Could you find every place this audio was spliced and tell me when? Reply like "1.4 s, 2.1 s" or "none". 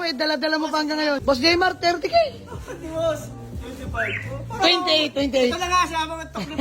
1.2 s